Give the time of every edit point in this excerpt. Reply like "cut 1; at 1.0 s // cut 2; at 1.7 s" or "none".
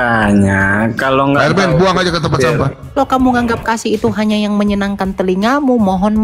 cut 1; at 3.0 s